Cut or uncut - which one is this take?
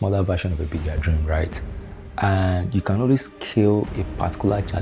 uncut